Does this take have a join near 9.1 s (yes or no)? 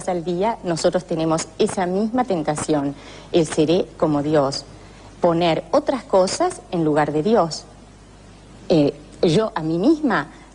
no